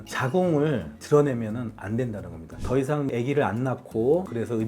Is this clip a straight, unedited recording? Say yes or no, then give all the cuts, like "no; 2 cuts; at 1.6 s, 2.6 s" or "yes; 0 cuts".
no; 1 cut; at 2.6 s